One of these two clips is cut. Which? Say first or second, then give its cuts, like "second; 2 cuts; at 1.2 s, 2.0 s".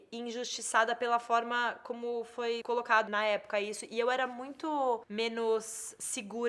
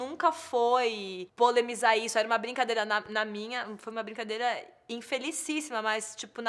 first; 2 cuts; at 3.0 s, 5.1 s